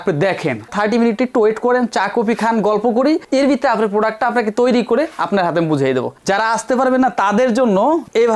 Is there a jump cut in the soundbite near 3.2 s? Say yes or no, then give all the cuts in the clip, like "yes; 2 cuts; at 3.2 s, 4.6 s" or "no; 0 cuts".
no; 1 cut; at 6.2 s